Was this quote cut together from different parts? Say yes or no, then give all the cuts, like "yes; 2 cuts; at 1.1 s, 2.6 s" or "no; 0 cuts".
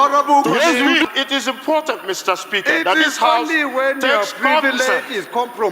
yes; 1 cut; at 1.0 s